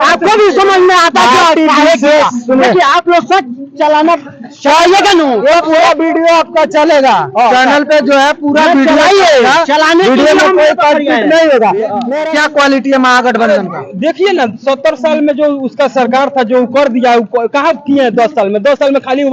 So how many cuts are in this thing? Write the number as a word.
one